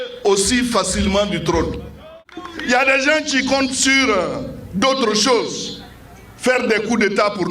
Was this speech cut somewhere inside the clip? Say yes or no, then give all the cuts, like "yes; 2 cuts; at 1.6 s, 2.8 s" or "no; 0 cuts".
yes; 1 cut; at 2.1 s